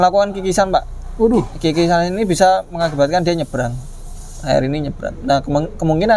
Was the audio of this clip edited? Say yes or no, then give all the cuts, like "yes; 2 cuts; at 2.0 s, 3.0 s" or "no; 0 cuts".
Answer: no; 0 cuts